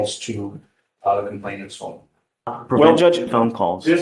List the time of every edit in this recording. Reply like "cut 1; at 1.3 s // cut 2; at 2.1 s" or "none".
cut 1; at 2.6 s